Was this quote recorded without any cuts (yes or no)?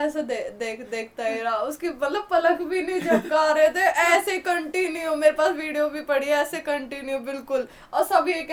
yes